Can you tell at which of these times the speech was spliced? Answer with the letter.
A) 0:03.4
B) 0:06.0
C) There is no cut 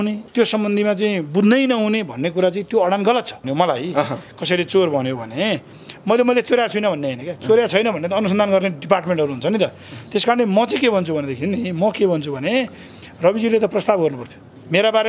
A